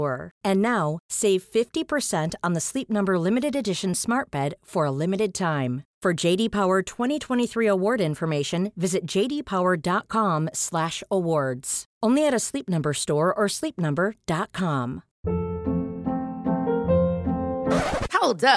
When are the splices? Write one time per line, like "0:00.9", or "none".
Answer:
0:15.1